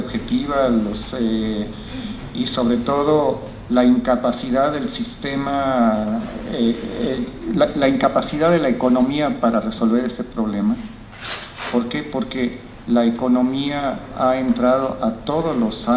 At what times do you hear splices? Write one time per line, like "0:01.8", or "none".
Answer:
0:06.1